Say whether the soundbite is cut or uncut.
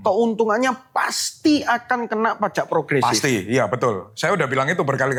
uncut